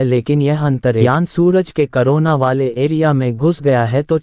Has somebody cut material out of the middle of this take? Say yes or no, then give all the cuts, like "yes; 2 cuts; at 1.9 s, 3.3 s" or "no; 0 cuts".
yes; 1 cut; at 1.0 s